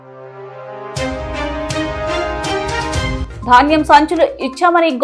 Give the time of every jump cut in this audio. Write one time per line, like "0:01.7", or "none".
0:03.2